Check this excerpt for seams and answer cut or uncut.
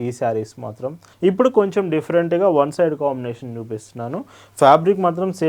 cut